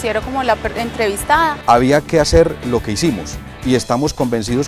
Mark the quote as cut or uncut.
cut